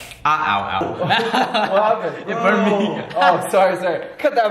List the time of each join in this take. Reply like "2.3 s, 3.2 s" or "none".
none